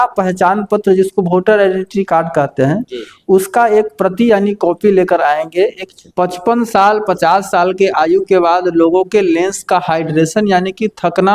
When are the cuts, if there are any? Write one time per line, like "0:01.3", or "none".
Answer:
0:05.8